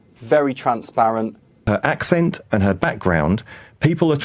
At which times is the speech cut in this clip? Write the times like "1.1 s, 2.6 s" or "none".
1.6 s